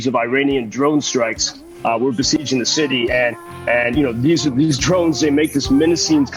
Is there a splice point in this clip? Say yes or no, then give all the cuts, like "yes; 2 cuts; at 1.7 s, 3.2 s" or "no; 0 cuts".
no; 0 cuts